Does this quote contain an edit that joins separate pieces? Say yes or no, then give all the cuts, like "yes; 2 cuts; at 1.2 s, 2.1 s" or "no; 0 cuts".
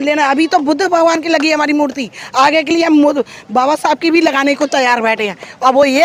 no; 0 cuts